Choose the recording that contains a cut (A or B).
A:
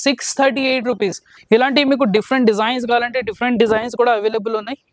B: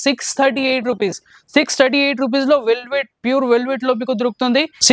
A